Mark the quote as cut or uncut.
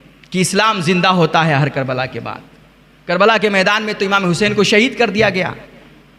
uncut